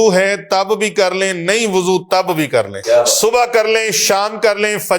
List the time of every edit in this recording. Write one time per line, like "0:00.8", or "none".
0:02.8